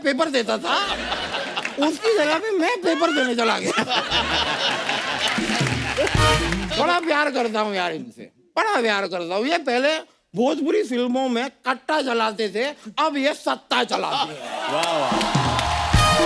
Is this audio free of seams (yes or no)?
no